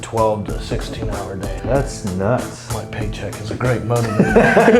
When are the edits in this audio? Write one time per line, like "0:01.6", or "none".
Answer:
0:01.5
0:02.7